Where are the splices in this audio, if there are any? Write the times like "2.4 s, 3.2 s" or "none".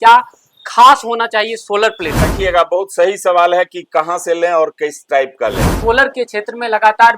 2.3 s, 5.7 s